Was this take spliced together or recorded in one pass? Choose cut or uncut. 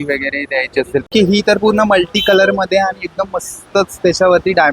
cut